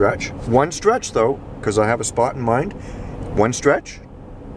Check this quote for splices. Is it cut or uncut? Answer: uncut